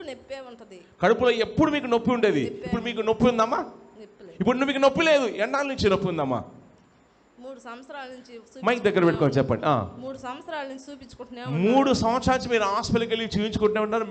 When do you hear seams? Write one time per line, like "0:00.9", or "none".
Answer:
none